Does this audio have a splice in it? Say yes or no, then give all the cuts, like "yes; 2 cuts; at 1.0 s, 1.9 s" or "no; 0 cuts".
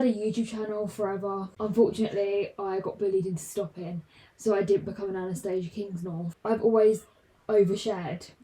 yes; 2 cuts; at 1.5 s, 6.3 s